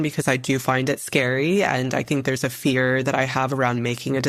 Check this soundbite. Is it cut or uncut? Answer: cut